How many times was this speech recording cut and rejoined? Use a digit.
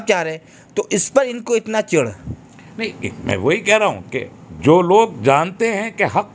0